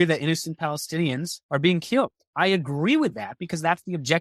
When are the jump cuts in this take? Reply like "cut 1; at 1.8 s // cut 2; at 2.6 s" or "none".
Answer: cut 1; at 1.3 s // cut 2; at 2.2 s